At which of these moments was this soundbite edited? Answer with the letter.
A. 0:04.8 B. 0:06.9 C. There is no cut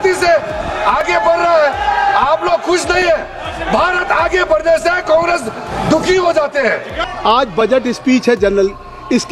B